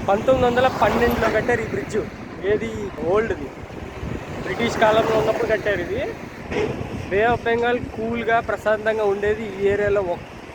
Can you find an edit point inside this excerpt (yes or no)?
yes